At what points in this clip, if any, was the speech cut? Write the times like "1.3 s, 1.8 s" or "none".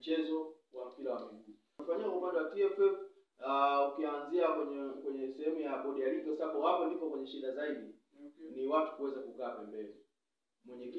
1.8 s